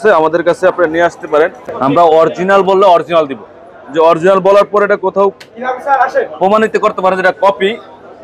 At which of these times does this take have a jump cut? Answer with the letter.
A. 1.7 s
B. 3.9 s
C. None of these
A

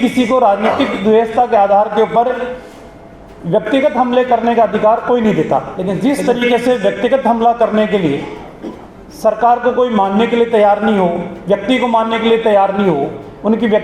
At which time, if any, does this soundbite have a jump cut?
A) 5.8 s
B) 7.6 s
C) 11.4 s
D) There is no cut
A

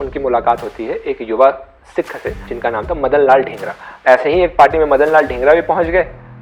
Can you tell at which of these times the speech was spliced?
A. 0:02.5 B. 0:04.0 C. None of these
B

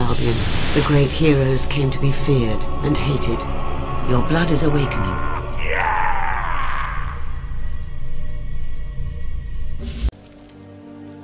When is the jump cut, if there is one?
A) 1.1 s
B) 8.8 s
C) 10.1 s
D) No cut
C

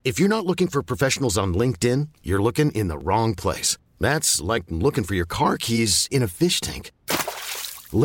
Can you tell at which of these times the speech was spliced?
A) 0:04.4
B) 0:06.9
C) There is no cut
C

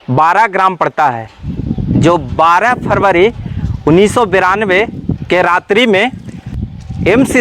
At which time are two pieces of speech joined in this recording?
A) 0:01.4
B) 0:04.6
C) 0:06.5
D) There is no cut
C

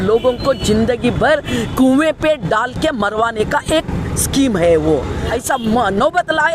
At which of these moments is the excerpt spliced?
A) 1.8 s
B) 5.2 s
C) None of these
B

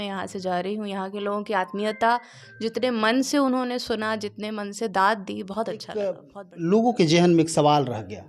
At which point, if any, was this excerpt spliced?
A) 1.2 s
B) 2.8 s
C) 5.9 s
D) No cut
C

